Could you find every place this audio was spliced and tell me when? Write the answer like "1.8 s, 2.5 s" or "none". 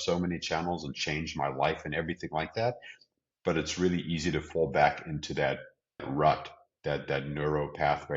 6.1 s